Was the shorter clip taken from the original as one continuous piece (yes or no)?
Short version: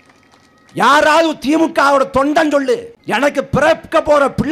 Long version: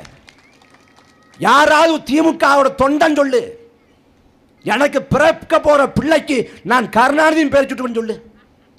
no